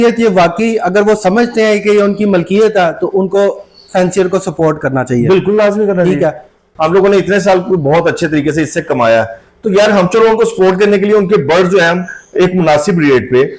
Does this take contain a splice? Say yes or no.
yes